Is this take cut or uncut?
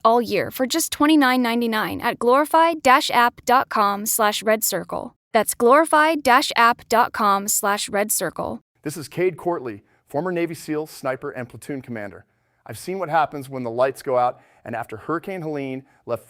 cut